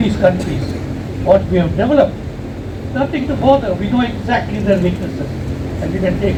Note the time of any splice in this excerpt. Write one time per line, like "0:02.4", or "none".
none